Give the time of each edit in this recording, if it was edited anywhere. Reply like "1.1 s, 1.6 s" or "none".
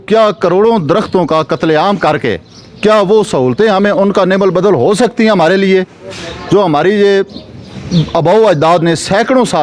none